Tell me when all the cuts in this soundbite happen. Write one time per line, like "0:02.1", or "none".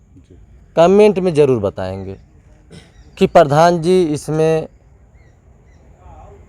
none